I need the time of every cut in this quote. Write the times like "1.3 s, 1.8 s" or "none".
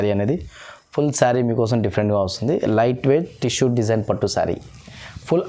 none